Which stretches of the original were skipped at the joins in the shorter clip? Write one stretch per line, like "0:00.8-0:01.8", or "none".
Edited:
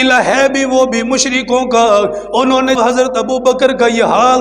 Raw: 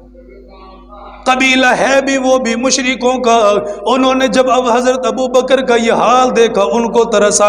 0:04.3-0:04.7